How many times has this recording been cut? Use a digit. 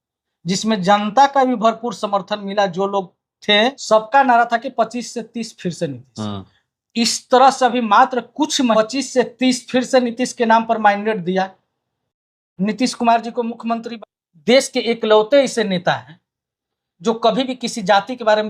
3